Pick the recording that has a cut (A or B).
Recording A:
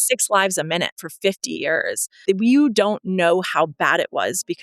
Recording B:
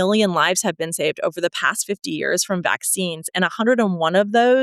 A